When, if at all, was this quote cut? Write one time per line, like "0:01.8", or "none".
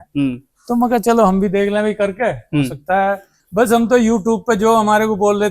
0:03.4